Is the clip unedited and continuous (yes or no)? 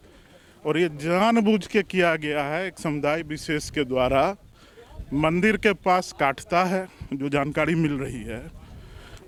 yes